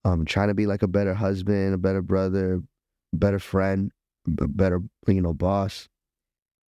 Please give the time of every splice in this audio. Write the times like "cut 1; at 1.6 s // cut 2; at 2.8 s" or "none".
cut 1; at 3.0 s